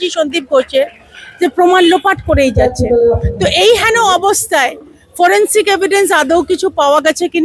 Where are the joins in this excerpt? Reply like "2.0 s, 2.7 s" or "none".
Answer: none